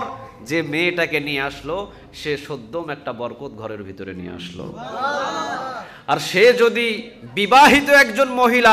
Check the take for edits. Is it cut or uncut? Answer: uncut